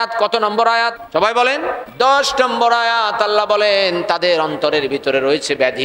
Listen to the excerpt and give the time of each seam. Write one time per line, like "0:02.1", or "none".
0:01.0